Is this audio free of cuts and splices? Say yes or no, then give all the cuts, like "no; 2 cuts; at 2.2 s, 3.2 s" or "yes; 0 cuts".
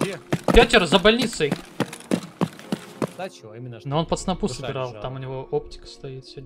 no; 1 cut; at 3.1 s